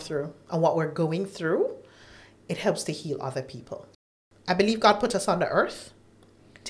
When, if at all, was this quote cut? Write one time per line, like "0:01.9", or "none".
0:04.0